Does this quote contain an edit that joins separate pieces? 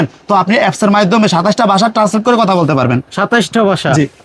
no; 0 cuts

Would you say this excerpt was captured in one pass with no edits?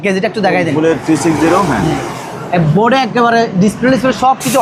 yes; 0 cuts

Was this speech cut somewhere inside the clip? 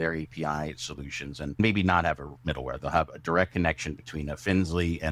yes; 1 cut; at 1.6 s

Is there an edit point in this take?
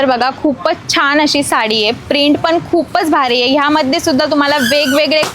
no; 0 cuts

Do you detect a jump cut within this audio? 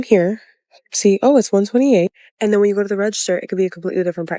no; 0 cuts

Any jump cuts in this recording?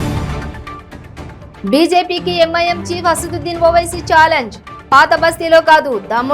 yes; 1 cut; at 1.4 s

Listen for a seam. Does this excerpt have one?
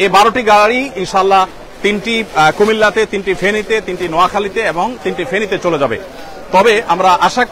no; 0 cuts

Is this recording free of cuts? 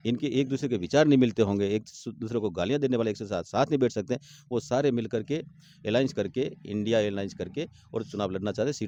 yes; 0 cuts

